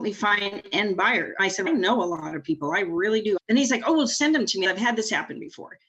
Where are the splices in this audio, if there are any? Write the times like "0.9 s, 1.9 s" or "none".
1.5 s, 3.4 s, 4.6 s